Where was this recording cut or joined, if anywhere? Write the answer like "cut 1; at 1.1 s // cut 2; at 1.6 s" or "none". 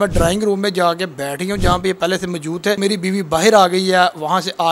cut 1; at 2.8 s